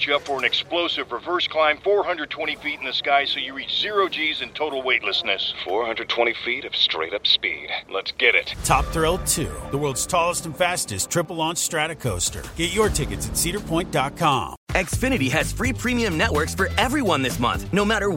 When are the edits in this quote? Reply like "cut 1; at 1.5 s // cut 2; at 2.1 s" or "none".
cut 1; at 14.5 s